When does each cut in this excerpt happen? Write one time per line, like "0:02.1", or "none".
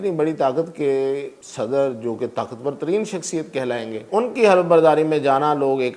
0:01.4
0:04.1